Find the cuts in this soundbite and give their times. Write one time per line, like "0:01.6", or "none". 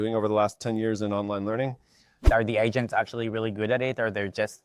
0:02.3